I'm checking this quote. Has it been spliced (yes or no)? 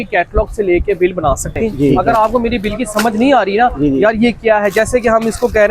yes